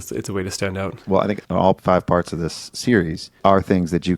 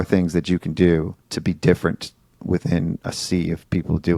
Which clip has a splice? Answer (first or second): first